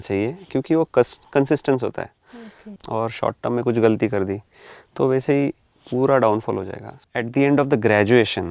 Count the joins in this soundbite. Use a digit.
2